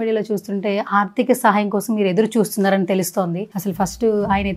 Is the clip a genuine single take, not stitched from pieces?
yes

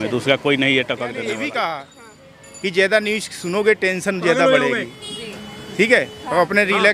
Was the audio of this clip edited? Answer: yes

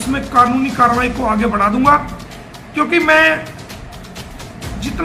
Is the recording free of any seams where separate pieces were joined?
yes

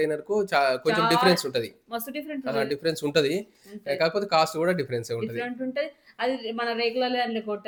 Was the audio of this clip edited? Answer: no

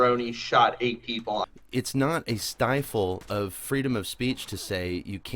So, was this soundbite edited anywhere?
yes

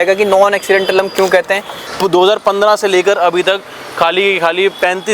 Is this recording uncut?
no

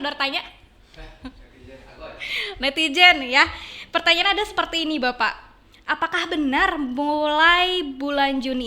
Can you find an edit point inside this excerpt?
no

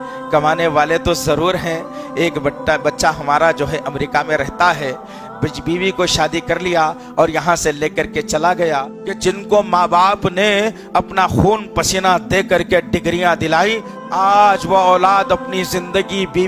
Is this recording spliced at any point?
yes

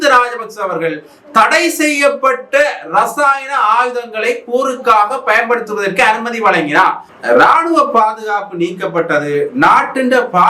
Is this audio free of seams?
no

